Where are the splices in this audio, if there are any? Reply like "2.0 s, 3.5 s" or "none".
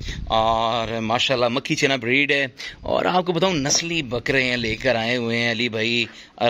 none